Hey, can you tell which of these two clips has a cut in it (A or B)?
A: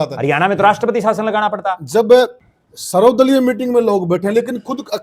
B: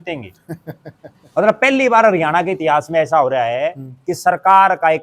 A